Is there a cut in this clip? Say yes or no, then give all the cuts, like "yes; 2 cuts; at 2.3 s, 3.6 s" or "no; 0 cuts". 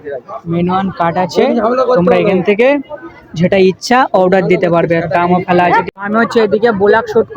yes; 1 cut; at 5.8 s